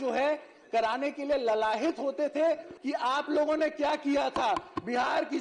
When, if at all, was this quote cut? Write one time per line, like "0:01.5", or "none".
0:02.7